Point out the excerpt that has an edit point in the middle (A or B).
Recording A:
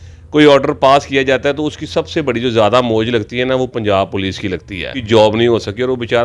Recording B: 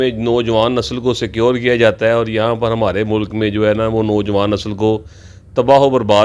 A